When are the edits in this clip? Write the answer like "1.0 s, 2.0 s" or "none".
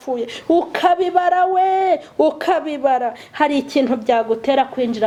none